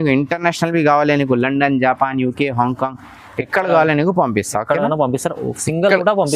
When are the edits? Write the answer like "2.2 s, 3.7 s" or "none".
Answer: none